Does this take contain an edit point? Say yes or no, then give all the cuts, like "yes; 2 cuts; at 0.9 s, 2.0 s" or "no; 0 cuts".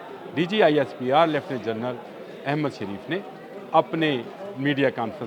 no; 0 cuts